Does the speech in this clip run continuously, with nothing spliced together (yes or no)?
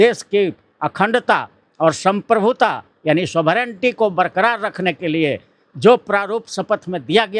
yes